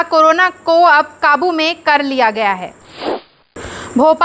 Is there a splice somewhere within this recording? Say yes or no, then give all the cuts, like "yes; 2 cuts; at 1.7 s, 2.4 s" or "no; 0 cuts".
yes; 1 cut; at 3.2 s